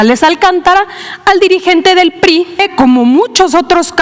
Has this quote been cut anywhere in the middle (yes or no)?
yes